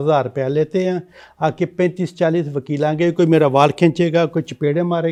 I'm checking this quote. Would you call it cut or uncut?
uncut